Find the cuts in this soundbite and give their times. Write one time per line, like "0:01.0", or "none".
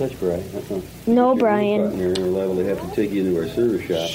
0:00.9
0:02.0